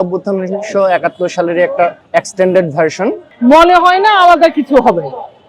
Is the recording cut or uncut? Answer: cut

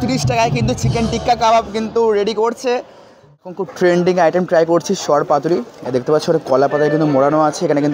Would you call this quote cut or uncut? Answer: cut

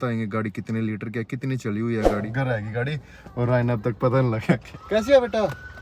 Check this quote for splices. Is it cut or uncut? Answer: cut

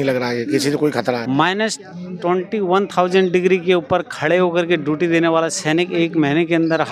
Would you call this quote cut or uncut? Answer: cut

